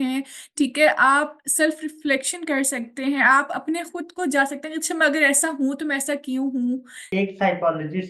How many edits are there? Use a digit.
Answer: 1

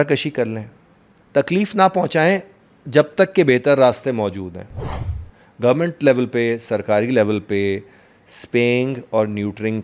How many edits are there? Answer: 0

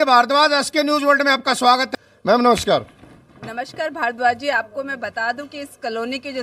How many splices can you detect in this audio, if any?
1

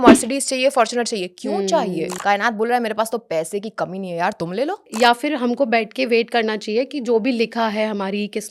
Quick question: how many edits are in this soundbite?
2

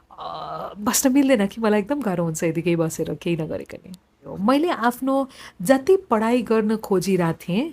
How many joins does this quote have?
1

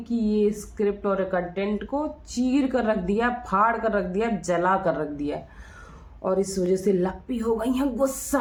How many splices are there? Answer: 0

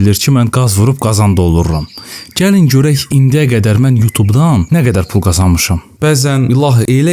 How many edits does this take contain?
2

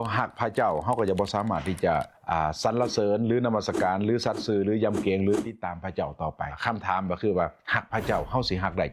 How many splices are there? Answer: 2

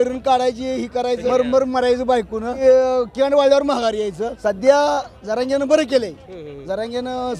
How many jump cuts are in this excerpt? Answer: 3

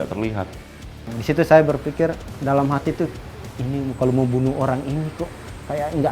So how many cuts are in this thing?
2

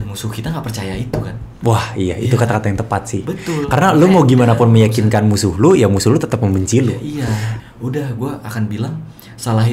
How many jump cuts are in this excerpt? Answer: 1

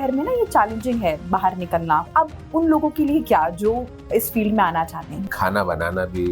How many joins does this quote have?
2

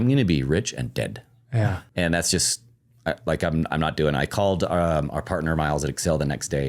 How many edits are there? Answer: 1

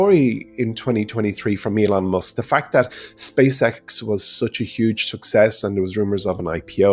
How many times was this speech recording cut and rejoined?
0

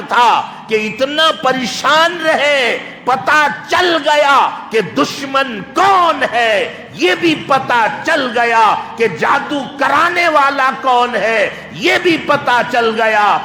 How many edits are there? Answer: 0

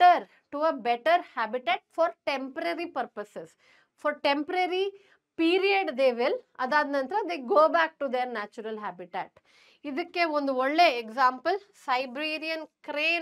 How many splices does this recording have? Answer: 0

